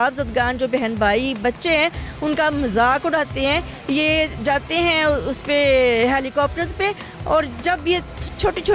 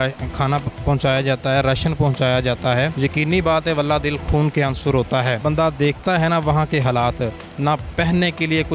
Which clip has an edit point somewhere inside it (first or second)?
second